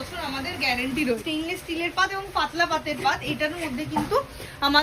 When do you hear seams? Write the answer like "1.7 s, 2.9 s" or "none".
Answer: 1.2 s